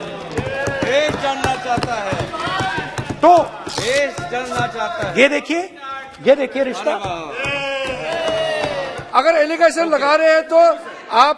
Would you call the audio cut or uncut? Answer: cut